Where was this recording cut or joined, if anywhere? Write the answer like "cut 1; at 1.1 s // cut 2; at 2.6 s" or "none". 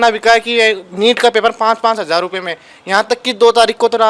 none